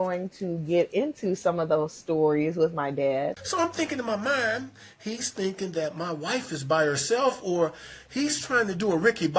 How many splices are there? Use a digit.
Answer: 1